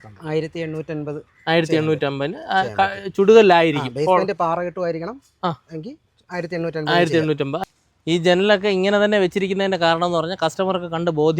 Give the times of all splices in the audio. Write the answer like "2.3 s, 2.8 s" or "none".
7.6 s